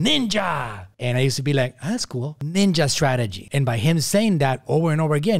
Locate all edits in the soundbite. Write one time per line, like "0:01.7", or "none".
0:02.4